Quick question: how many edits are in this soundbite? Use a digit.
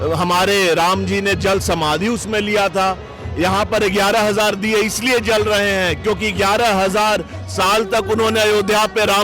0